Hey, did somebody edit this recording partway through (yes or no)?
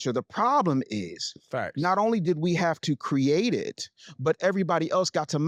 no